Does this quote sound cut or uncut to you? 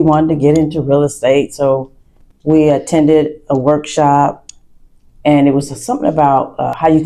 uncut